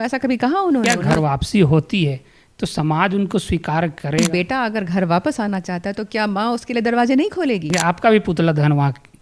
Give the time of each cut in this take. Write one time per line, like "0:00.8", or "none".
0:00.9
0:04.2
0:07.8